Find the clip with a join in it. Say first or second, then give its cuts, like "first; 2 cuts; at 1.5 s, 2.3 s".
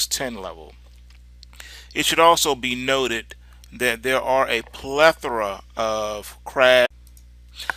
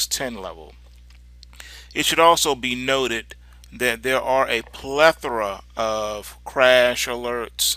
second; 1 cut; at 6.9 s